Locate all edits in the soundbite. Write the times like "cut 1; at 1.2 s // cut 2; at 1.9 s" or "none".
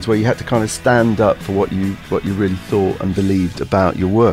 none